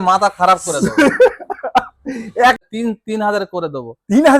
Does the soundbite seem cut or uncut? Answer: cut